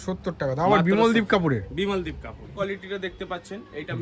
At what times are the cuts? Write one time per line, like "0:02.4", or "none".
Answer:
0:02.5